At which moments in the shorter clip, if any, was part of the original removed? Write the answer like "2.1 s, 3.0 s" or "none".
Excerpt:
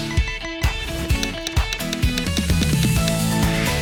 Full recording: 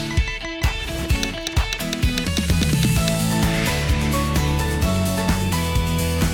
none